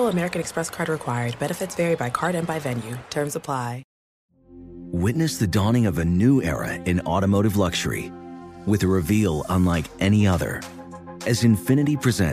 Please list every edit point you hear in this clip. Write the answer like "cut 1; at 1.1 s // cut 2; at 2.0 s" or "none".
none